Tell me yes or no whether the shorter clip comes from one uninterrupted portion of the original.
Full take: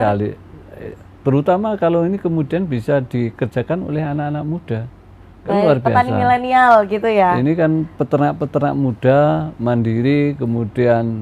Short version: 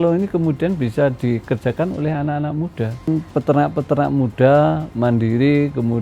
no